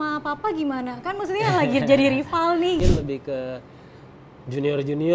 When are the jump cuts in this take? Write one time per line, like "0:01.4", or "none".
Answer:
0:02.8